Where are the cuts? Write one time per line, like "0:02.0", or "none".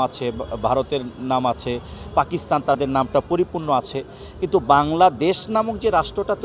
none